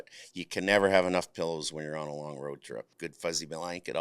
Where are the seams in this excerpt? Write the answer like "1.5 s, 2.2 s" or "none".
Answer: 2.9 s

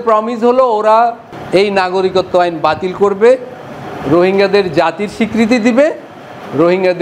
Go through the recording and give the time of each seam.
none

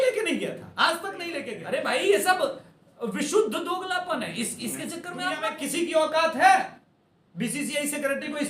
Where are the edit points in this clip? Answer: 1.4 s, 5.4 s

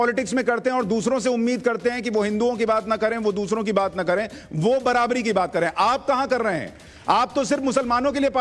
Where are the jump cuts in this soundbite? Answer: none

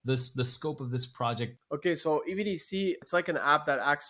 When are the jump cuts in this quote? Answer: 1.6 s, 3.0 s

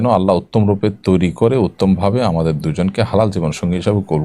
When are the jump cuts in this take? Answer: none

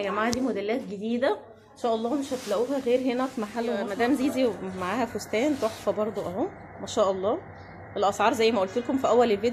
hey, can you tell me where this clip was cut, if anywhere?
3.9 s

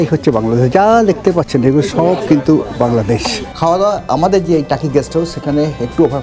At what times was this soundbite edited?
3.4 s

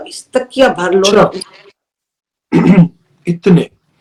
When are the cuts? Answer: none

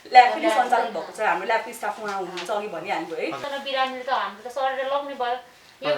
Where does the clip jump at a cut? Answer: 3.4 s

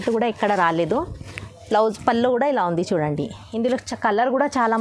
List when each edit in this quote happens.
none

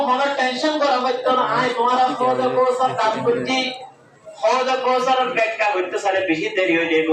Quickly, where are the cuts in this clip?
none

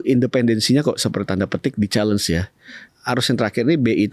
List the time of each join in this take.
2.9 s

